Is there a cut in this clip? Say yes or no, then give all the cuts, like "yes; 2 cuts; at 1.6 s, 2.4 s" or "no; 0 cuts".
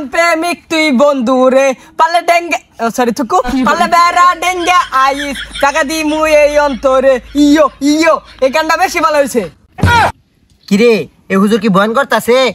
yes; 1 cut; at 10.0 s